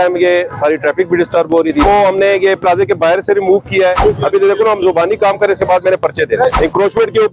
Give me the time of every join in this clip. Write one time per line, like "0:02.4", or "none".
0:01.8
0:04.0
0:06.6